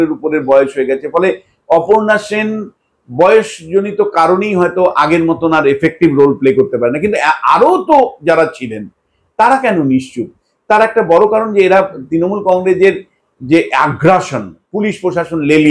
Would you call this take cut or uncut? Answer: uncut